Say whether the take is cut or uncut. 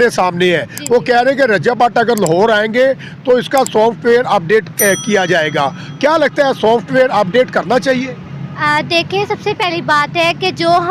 uncut